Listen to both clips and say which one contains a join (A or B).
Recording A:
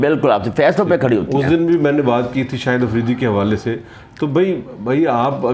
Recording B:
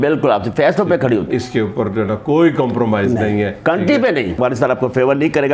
B